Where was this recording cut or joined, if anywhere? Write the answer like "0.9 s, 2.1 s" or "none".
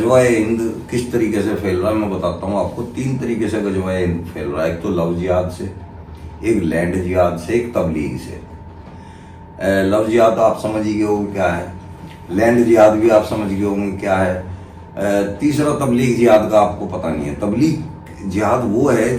none